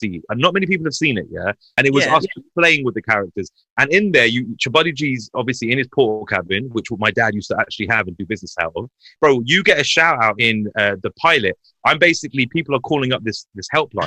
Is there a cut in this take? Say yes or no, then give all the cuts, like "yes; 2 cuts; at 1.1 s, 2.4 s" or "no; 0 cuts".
yes; 3 cuts; at 1.7 s, 9.0 s, 10.4 s